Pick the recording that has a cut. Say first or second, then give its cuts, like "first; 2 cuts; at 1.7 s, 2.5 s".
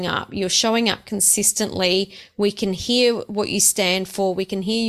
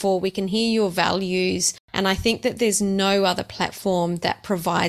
second; 1 cut; at 1.8 s